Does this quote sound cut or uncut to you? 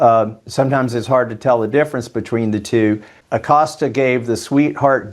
cut